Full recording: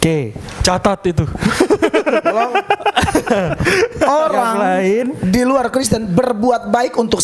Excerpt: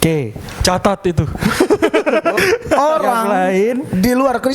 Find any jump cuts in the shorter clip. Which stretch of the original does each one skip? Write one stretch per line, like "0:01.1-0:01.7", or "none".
0:02.3-0:03.6